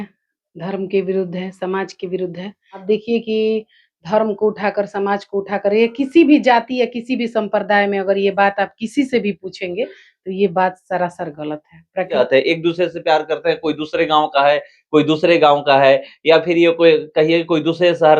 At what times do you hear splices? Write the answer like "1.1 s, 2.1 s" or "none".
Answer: 2.8 s, 12.1 s